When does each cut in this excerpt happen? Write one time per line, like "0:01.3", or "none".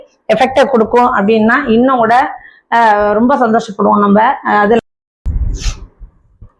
0:04.8